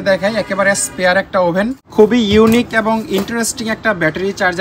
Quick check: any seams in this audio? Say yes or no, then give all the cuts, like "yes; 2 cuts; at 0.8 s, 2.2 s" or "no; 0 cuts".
yes; 1 cut; at 1.8 s